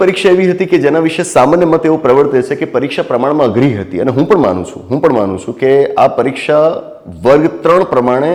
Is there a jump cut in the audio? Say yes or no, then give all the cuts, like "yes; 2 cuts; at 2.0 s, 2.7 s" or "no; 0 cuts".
no; 0 cuts